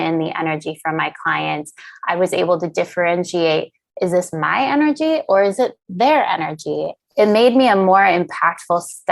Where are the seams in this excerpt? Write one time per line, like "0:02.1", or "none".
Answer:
0:06.9